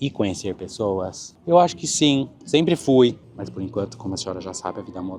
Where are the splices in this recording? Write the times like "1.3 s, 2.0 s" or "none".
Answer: 3.3 s